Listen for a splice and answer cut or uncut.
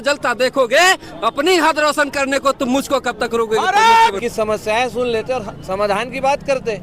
cut